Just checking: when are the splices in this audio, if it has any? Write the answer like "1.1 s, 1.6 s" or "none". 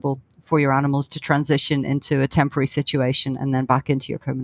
none

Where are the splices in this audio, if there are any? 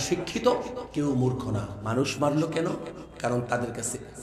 1.8 s

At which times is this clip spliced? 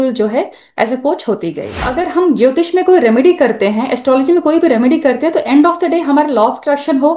1.9 s

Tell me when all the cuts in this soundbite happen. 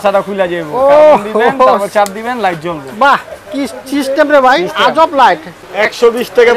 5.5 s

